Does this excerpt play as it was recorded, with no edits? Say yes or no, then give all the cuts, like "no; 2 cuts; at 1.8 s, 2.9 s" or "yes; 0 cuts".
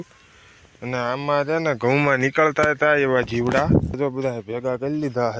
no; 1 cut; at 3.9 s